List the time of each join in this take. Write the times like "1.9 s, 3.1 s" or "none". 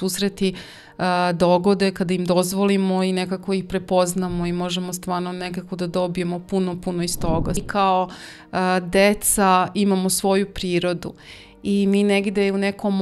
7.6 s